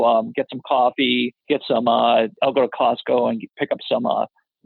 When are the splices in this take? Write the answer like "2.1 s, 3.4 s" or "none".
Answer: 1.4 s, 2.4 s